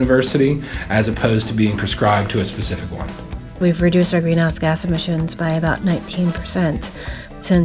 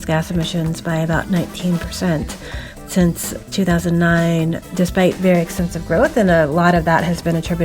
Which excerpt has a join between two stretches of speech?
first; 1 cut; at 3.6 s

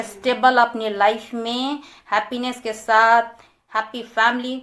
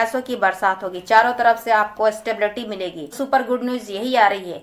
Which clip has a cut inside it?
second; 1 cut; at 3.0 s

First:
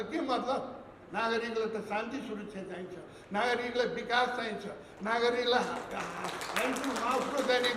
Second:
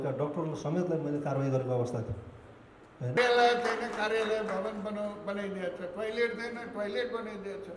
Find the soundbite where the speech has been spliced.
second; 1 cut; at 3.2 s

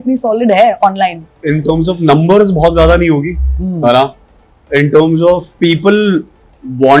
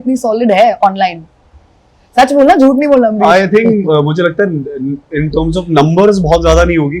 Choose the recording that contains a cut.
first; 2 cuts; at 1.3 s, 5.5 s

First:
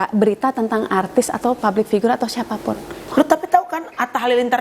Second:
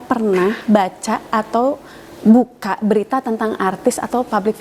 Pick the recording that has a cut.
first; 1 cut; at 3.0 s

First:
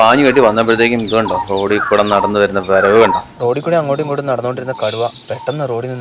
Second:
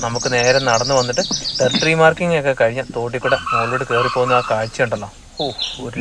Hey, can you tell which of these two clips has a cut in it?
first; 1 cut; at 3.3 s

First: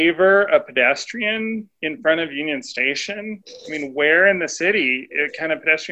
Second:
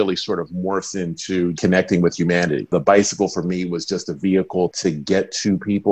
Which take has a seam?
second; 3 cuts; at 1.5 s, 2.7 s, 4.7 s

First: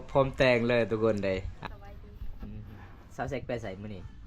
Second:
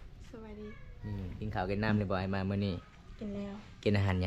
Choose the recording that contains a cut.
first; 1 cut; at 1.5 s

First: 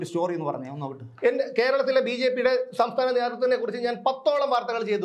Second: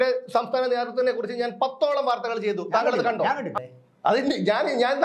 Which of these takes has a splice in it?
second; 1 cut; at 3.5 s

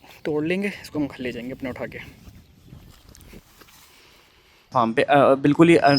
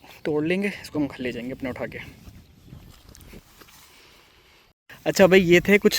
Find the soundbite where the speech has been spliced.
first; 1 cut; at 4.7 s

